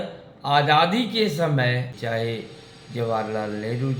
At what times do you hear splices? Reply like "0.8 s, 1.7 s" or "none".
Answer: 1.9 s